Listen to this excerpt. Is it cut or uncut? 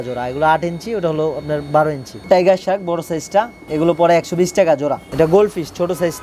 cut